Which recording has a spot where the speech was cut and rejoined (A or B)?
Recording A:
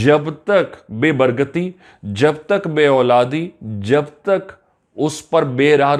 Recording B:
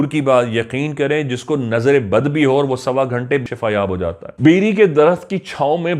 B